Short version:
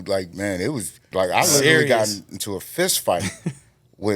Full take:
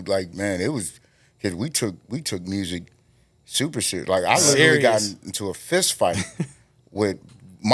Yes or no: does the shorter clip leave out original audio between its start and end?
yes